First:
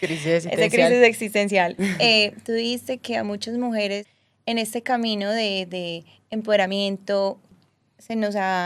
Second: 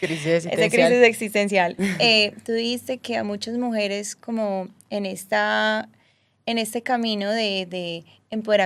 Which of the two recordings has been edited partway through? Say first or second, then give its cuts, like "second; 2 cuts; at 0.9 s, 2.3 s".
first; 2 cuts; at 4.1 s, 7.5 s